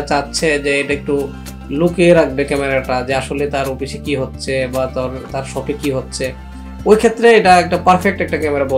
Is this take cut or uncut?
uncut